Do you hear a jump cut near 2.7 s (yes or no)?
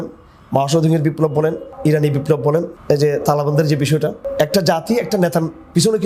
yes